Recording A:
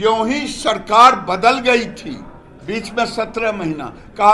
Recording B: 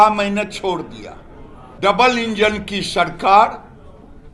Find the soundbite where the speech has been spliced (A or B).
B